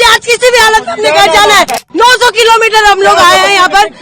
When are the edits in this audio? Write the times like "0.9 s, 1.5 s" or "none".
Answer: 1.8 s